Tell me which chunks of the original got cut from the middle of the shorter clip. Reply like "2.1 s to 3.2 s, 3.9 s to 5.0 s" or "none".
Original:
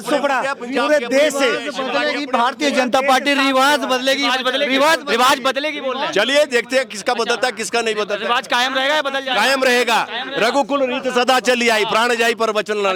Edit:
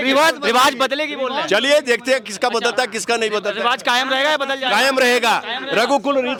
none

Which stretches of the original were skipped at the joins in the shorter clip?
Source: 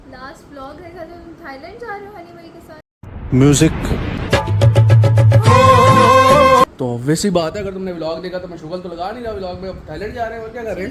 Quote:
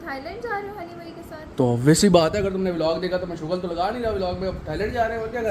2.9 s to 6.8 s

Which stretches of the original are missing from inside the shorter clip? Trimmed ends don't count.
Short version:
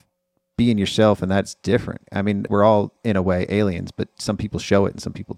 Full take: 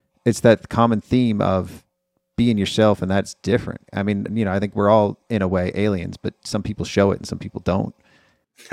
4.0 s to 4.5 s

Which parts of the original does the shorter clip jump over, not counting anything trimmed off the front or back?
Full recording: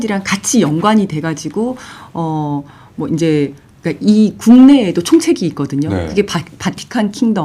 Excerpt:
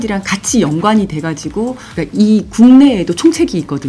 1.9 s to 3.8 s

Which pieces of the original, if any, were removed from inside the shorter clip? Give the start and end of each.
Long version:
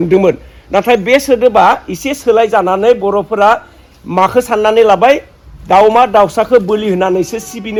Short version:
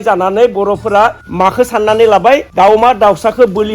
3.7 s to 4.0 s, 5.3 s to 5.6 s

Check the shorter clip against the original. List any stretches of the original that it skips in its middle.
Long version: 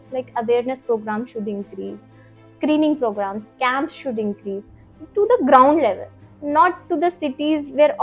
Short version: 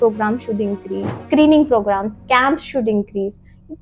2.0 s to 2.4 s

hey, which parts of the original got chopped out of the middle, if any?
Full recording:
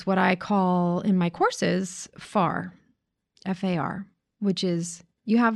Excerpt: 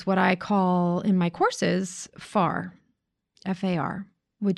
none

